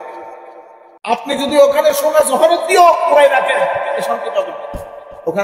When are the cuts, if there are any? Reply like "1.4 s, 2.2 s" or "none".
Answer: 1.1 s

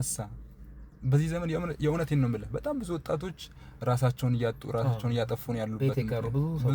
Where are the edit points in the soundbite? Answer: none

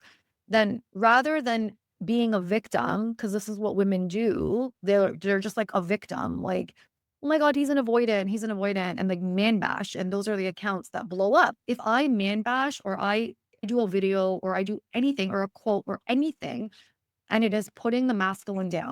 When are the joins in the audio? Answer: 2.0 s, 11.6 s, 13.7 s

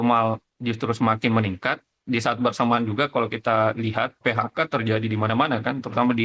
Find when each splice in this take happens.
1.9 s, 4.2 s

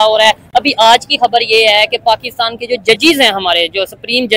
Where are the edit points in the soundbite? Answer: none

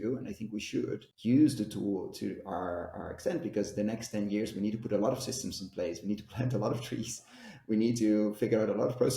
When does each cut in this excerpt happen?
none

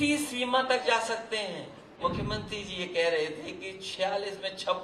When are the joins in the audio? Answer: 2.0 s

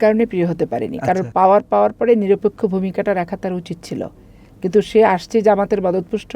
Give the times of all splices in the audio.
1.2 s

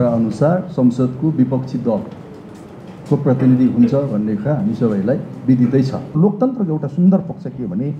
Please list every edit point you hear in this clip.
6.2 s

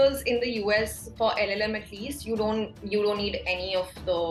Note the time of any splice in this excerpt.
none

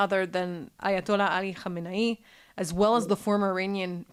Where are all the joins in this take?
none

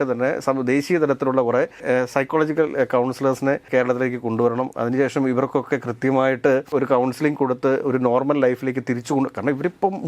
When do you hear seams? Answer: 1.8 s, 3.7 s, 6.7 s

